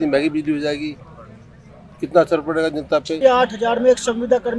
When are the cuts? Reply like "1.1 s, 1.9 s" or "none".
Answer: 3.2 s